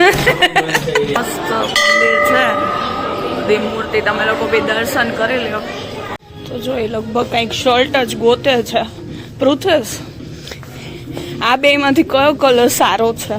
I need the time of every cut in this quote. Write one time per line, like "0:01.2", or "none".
0:01.2
0:06.2

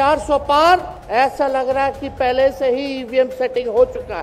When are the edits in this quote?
0:00.9

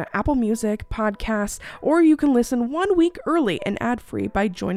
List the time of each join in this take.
none

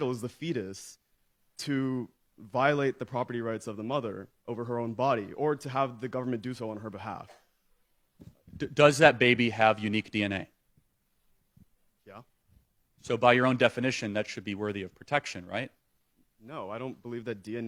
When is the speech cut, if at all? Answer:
none

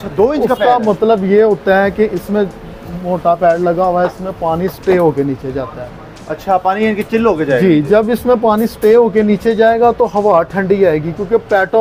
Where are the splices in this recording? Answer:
none

